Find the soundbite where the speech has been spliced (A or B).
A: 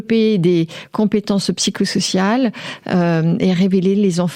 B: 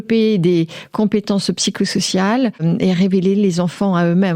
B